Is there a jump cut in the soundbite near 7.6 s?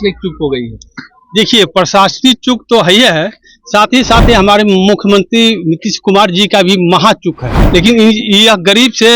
yes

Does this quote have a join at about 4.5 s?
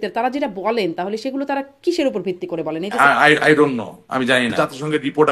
yes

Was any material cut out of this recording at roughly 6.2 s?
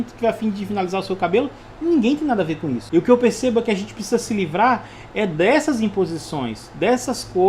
no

